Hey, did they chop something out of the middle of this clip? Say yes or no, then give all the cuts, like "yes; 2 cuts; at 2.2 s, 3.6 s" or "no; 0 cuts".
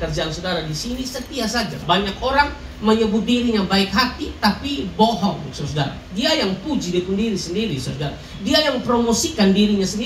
yes; 1 cut; at 1.8 s